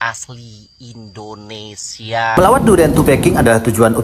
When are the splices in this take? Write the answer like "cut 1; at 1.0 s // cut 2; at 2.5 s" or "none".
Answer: cut 1; at 2.4 s